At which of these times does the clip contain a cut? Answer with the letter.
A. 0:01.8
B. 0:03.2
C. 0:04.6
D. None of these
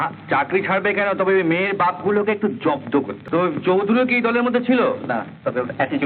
B